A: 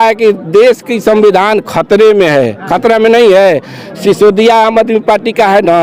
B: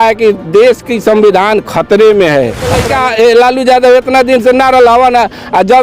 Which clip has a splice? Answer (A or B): B